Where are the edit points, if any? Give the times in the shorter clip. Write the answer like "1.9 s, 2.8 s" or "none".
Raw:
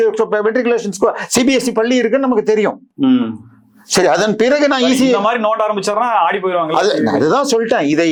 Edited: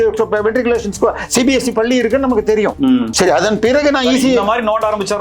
2.8 s

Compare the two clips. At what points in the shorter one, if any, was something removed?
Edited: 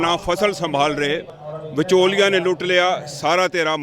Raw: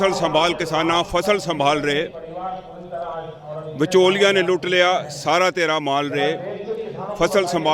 1.4 s

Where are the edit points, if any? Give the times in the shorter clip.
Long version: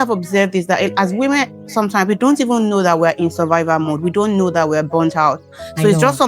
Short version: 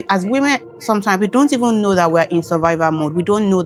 none

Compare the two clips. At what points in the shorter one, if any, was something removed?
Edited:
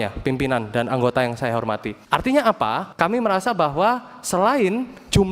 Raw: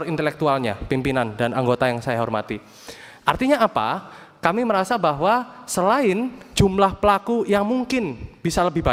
1.9 s, 2.8 s

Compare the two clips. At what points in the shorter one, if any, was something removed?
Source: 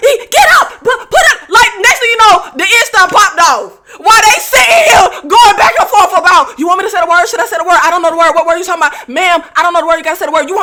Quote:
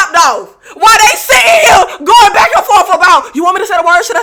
none

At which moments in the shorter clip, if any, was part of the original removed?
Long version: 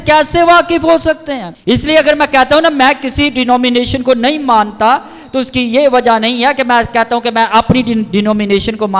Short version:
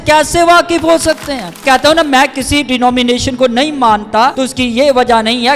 1.6 s, 4.3 s

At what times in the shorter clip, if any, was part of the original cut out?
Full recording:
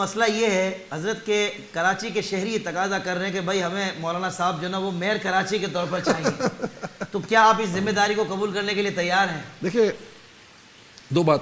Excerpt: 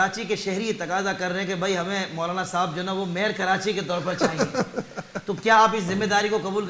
none

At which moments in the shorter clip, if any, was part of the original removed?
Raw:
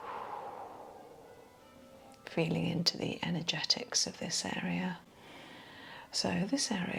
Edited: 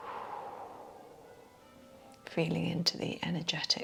none

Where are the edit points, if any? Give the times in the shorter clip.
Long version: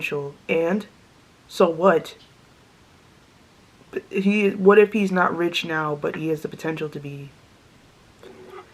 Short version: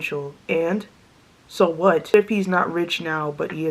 2.1 s

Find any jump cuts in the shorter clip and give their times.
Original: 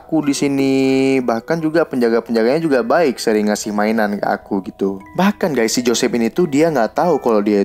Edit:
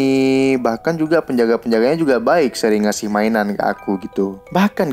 none

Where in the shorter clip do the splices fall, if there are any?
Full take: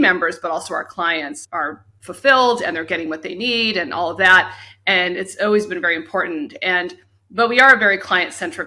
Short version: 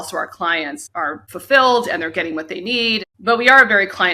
1.3 s, 3.0 s

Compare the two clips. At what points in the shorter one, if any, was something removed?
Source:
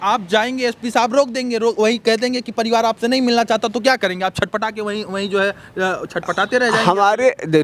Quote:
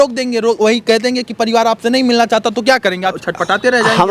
3.2 s

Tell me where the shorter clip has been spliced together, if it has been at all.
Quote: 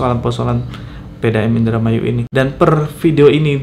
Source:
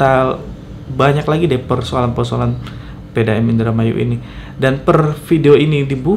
2.2 s

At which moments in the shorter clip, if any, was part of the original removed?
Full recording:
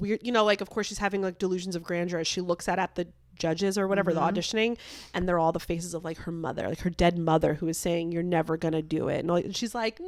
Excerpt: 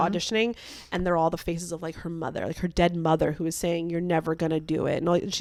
none

